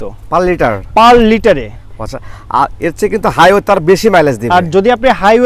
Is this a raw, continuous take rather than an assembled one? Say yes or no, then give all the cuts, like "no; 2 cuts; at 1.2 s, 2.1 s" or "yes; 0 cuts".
yes; 0 cuts